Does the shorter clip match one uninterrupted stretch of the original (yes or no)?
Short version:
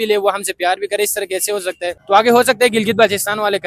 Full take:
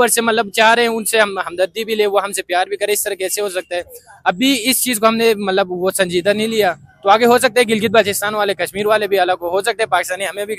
no